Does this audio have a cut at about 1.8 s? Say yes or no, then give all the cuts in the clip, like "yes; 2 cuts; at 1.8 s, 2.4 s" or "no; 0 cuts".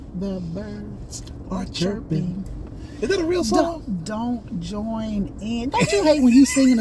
no; 0 cuts